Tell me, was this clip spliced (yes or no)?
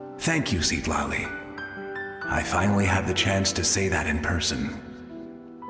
yes